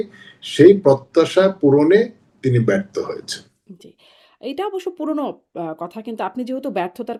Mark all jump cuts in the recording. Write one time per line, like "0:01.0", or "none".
none